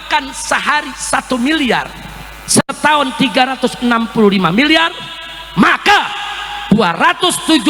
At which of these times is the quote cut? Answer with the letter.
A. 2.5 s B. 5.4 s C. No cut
C